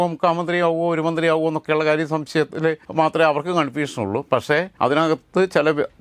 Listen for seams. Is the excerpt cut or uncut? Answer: cut